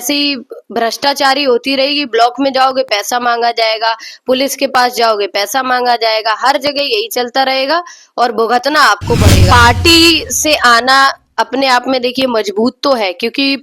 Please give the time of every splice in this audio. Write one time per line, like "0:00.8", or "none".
0:09.4